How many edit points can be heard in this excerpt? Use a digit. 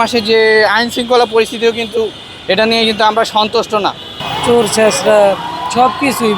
0